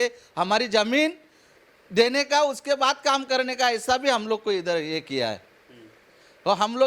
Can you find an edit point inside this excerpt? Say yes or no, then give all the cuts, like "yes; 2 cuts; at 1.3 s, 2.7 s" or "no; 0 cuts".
no; 0 cuts